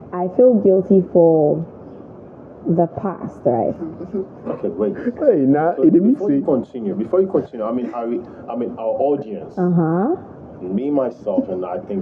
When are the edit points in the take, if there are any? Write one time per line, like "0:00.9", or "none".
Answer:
none